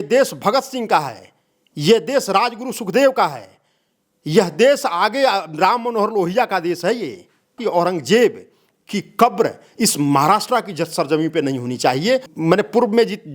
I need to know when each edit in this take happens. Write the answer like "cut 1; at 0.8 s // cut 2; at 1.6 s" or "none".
cut 1; at 7.6 s // cut 2; at 12.3 s